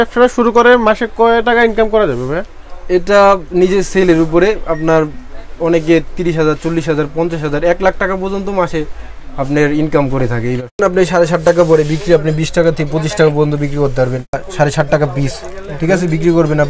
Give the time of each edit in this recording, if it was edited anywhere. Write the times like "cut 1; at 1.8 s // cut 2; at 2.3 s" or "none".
cut 1; at 10.8 s // cut 2; at 14.4 s